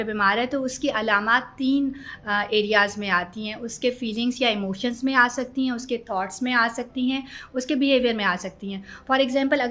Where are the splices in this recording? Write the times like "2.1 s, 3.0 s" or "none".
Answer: none